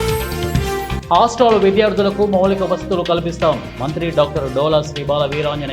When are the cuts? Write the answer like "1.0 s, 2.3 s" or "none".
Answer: 1.0 s

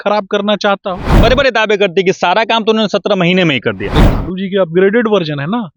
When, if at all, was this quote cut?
1.2 s, 4.0 s

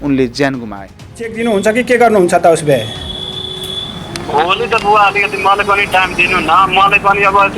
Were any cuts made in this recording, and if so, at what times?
1.1 s

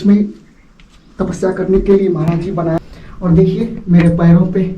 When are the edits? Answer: 2.8 s

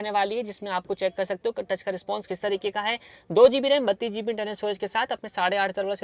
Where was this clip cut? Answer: none

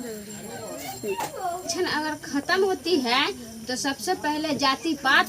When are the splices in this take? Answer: 1.6 s

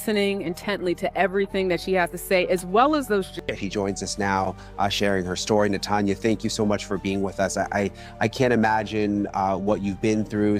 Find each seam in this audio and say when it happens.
3.4 s

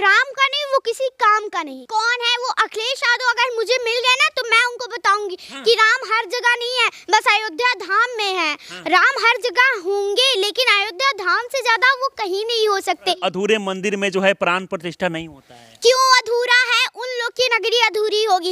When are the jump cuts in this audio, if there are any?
1.8 s, 13.2 s

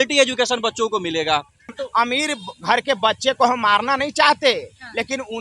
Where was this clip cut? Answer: 1.8 s

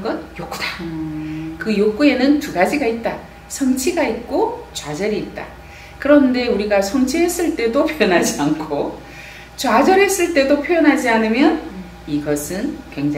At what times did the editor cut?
none

